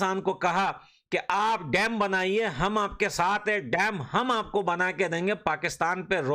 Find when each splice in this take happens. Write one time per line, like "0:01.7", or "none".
none